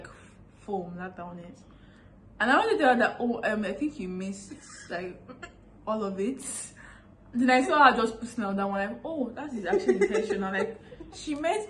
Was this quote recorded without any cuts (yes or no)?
yes